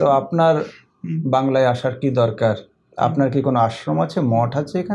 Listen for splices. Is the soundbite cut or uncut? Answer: uncut